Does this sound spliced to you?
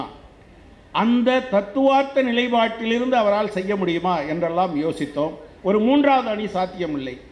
yes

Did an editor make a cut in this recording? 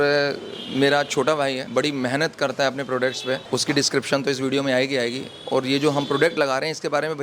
yes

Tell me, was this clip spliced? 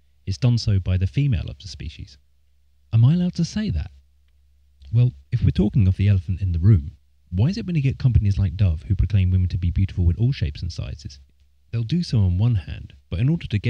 yes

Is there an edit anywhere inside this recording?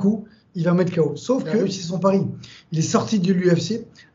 yes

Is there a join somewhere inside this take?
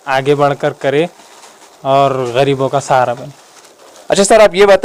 no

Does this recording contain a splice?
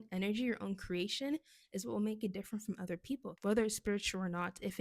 yes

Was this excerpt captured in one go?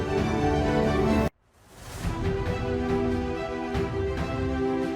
no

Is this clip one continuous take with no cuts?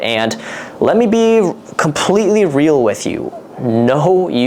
yes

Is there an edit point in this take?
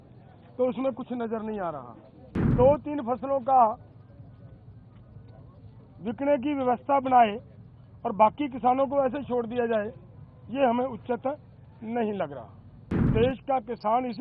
yes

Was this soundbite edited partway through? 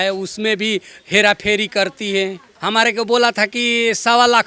yes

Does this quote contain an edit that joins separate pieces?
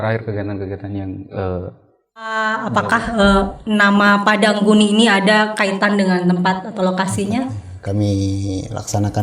yes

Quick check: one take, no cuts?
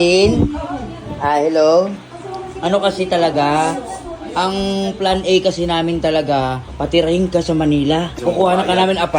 no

